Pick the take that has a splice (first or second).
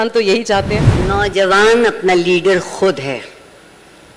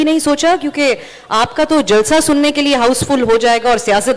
first